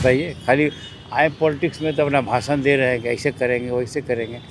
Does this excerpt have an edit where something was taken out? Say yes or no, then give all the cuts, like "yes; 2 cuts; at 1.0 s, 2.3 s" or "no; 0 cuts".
no; 0 cuts